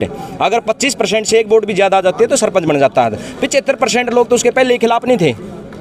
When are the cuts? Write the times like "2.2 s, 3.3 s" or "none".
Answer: none